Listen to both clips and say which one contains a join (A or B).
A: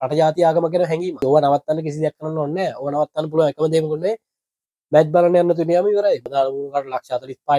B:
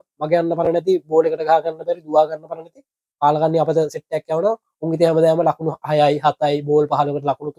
A